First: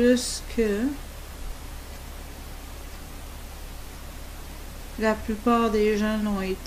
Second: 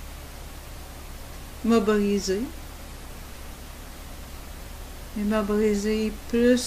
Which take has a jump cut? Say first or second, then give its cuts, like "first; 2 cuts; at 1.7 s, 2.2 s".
first; 1 cut; at 3.4 s